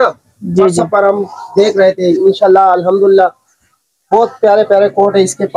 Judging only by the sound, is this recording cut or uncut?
uncut